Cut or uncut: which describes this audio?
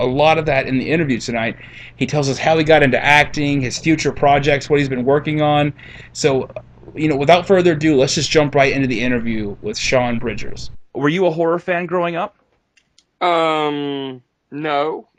uncut